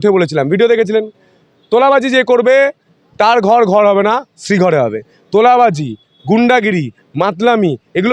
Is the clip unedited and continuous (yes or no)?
yes